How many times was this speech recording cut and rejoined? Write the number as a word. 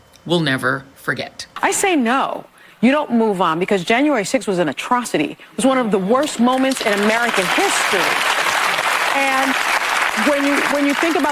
one